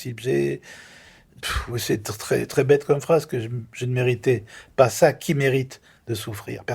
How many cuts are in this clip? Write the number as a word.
one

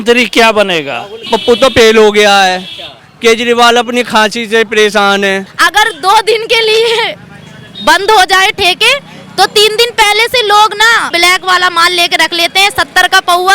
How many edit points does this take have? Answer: three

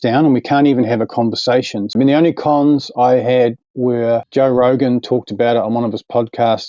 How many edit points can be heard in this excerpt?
two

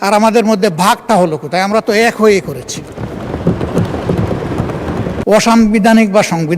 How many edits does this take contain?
one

